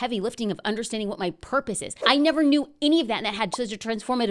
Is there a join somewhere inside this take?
yes; 1 cut; at 1.9 s

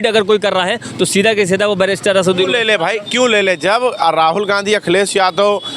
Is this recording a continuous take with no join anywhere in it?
yes; 0 cuts

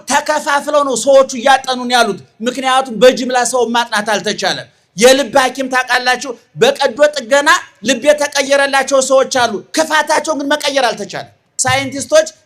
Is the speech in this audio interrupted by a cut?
yes; 1 cut; at 11.4 s

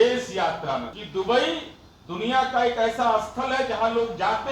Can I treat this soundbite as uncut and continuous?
no; 1 cut; at 1.0 s

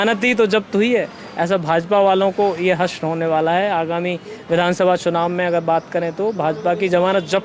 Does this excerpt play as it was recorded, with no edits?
yes; 0 cuts

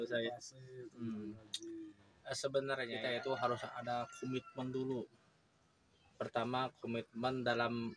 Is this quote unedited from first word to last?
no; 1 cut; at 2.9 s

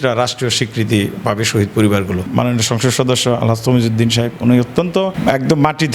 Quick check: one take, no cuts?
no; 2 cuts; at 2.3 s, 5.2 s

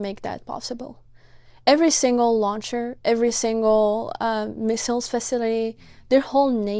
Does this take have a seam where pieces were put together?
no; 0 cuts

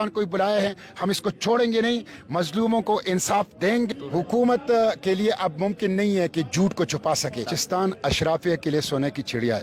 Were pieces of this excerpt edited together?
yes; 2 cuts; at 3.9 s, 7.6 s

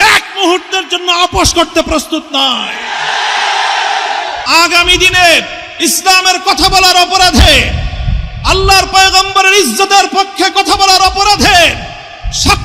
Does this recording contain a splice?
yes; 1 cut; at 4.4 s

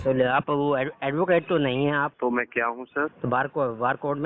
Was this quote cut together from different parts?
yes; 2 cuts; at 2.1 s, 3.1 s

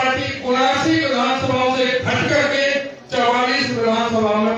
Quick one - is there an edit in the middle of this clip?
no; 0 cuts

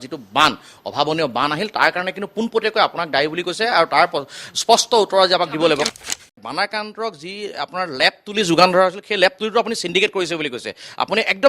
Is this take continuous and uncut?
no; 1 cut; at 5.9 s

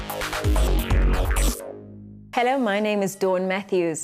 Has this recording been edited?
yes; 1 cut; at 2.1 s

